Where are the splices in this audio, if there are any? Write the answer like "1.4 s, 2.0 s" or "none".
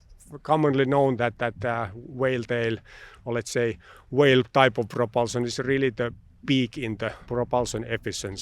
7.2 s